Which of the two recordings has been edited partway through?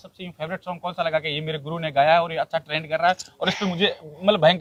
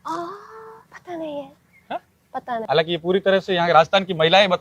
second; 1 cut; at 2.6 s

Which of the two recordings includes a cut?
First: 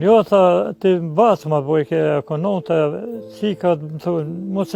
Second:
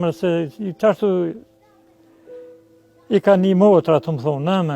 second; 2 cuts; at 1.7 s, 2.9 s

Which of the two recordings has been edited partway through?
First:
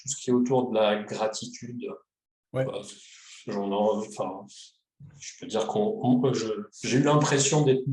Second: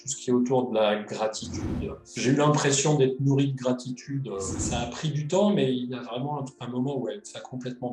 second; 2 cuts; at 2.1 s, 4.6 s

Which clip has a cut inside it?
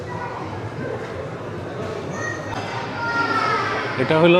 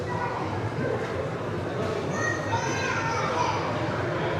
first; 1 cut; at 2.5 s

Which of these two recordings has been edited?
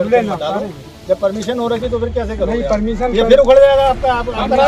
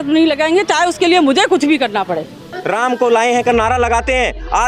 second; 1 cut; at 2.4 s

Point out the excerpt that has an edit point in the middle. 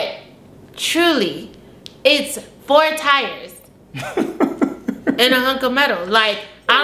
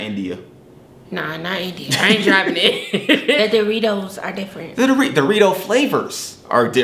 second; 1 cut; at 3.4 s

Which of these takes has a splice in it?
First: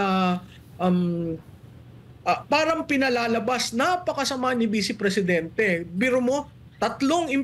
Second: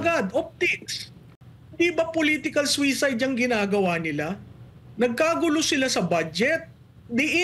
second; 1 cut; at 1.4 s

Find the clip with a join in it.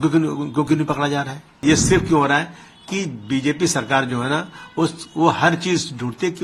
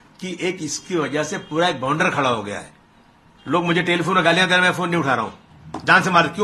first; 1 cut; at 1.6 s

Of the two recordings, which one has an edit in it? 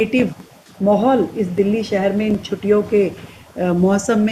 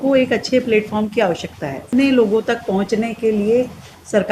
second; 1 cut; at 1.9 s

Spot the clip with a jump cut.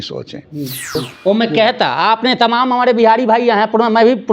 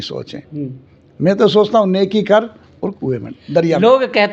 first; 1 cut; at 1.0 s

